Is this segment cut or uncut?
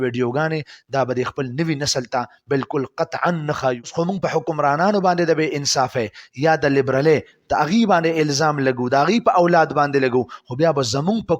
cut